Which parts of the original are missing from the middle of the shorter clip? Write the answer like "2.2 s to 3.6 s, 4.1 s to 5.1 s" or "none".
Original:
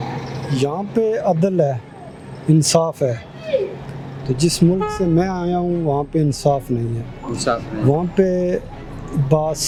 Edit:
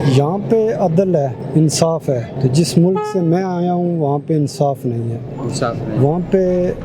1.8 s to 2.3 s, 3.2 s to 4.1 s

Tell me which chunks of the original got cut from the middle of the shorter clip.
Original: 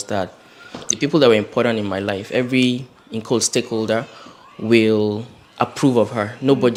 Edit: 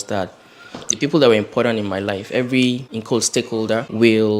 3.3 s to 4.0 s

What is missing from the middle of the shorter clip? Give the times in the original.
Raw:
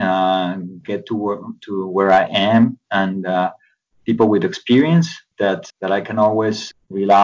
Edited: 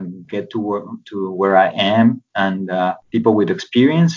3.6 s to 4.0 s

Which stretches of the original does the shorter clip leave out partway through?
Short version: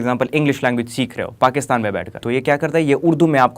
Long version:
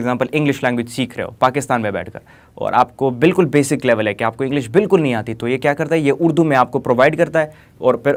2.2 s to 5.3 s

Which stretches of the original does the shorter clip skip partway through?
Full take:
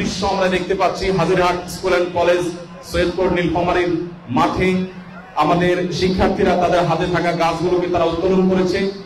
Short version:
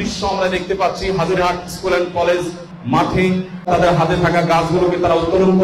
2.7 s to 4.2 s, 5.1 s to 6.6 s

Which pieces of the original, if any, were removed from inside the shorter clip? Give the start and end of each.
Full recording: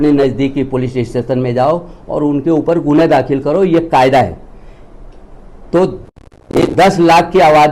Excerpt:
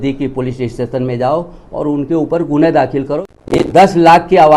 3.5 s to 6.2 s

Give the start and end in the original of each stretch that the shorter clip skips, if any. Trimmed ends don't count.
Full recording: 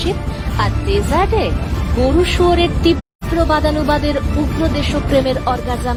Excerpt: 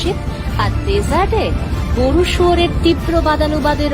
3.0 s to 3.3 s

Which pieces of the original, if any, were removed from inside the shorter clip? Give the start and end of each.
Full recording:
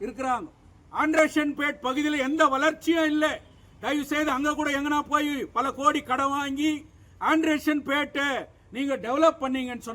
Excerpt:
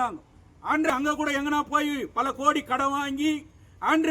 1.2 s to 4.3 s

